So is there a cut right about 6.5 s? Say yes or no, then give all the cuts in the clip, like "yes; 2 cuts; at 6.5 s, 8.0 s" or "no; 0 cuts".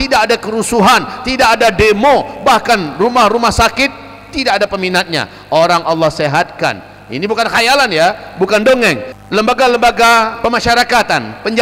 no; 2 cuts; at 9.1 s, 10.3 s